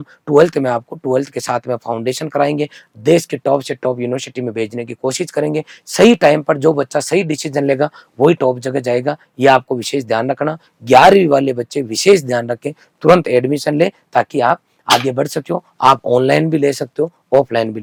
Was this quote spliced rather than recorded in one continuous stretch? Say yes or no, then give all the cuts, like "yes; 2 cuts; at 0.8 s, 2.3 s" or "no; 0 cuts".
no; 0 cuts